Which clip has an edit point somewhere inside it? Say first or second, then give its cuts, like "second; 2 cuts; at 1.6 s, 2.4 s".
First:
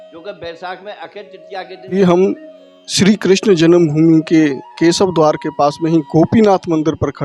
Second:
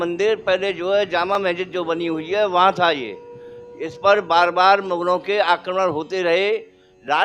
first; 1 cut; at 1.8 s